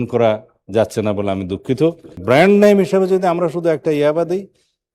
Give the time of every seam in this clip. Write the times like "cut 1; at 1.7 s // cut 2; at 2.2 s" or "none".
cut 1; at 2.2 s